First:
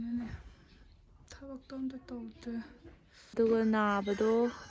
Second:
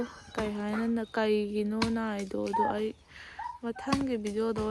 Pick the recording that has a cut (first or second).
first